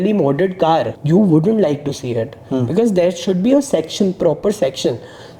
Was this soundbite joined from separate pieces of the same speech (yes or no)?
yes